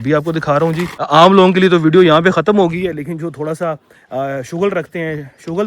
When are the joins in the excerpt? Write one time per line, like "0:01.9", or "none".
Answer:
0:00.9